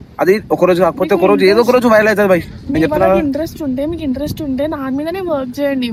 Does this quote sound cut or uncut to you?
uncut